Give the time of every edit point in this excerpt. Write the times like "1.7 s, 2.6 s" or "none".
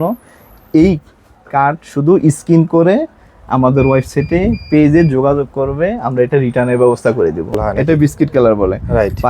7.6 s